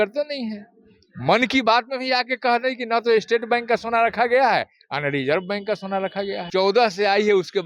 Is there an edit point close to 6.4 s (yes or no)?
yes